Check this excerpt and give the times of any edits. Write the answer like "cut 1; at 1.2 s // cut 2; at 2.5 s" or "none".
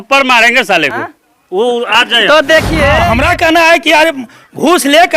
cut 1; at 3.1 s